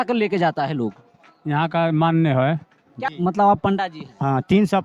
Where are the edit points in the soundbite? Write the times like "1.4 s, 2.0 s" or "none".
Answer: 3.1 s